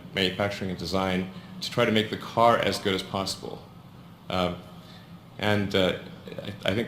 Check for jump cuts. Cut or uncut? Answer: cut